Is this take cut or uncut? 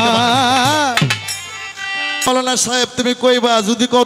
cut